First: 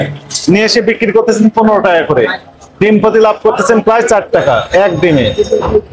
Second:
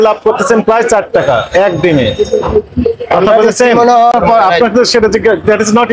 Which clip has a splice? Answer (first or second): second